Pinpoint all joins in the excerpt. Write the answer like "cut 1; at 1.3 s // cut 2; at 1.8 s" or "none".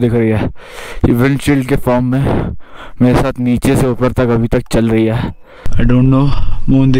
cut 1; at 5.6 s